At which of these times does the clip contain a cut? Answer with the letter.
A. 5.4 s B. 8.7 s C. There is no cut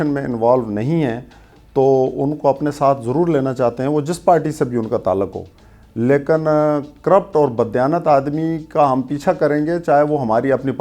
C